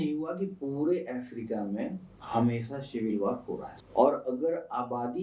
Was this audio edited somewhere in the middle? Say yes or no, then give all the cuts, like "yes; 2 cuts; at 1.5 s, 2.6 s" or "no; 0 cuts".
no; 0 cuts